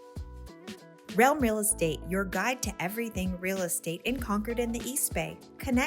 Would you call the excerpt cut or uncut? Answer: cut